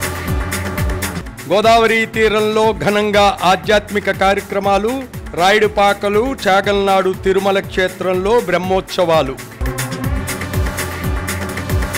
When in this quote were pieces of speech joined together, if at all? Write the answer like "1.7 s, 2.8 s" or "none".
1.2 s